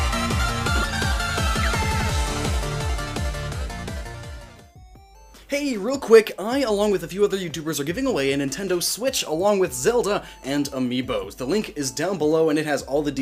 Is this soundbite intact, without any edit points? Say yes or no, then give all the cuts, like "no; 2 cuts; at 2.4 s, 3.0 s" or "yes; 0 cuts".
no; 1 cut; at 1.3 s